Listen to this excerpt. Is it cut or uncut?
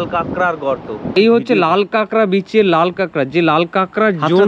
cut